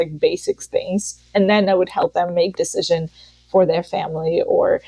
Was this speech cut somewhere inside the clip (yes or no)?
no